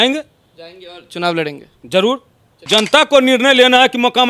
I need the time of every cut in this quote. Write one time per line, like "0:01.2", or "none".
0:02.5